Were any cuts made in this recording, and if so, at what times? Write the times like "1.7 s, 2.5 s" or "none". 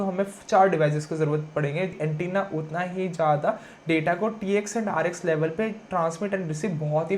1.9 s

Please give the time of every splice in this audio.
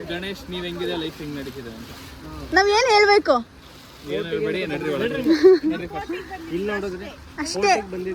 none

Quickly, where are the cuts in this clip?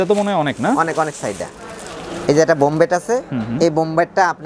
none

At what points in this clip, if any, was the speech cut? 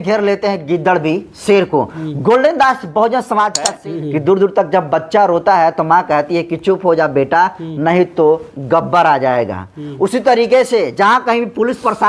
3.7 s

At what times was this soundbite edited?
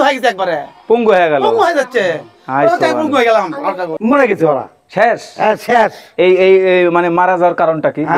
3.9 s

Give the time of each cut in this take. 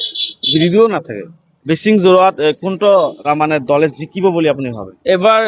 none

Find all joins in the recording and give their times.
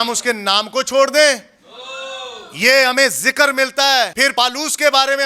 4.2 s

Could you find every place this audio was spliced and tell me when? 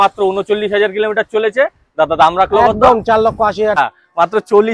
3.8 s

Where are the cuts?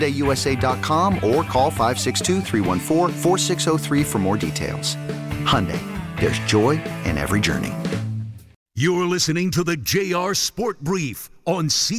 8.6 s

